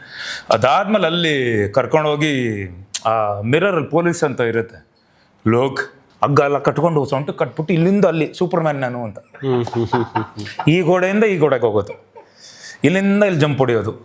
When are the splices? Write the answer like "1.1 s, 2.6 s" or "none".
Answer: 5.9 s